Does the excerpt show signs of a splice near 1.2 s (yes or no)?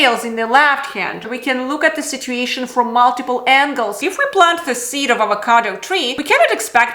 yes